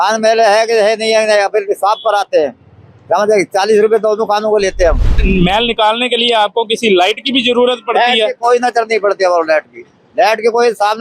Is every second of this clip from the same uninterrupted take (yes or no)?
no